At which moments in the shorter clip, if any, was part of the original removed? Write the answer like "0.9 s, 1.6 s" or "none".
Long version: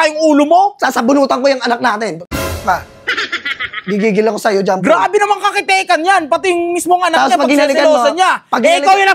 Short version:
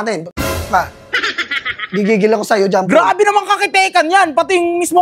none